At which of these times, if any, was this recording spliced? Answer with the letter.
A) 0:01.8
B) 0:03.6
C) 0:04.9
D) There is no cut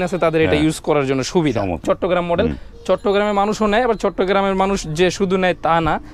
A